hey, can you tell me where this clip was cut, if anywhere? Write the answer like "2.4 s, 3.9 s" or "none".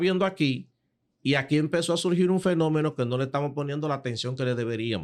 none